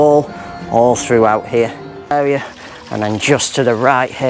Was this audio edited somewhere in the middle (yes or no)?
yes